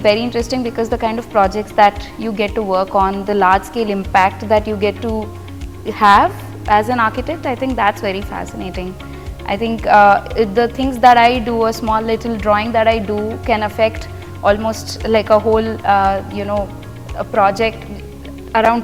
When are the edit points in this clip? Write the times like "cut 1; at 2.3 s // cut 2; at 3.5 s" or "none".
none